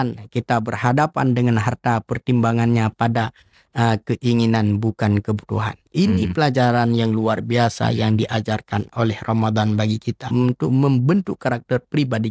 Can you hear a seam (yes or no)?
yes